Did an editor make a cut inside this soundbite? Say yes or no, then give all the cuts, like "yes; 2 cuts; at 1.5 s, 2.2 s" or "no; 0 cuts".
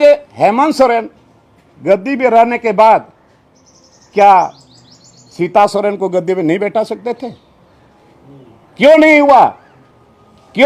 no; 0 cuts